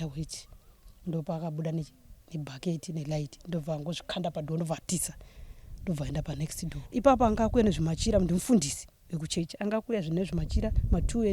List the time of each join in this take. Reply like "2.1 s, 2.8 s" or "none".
6.7 s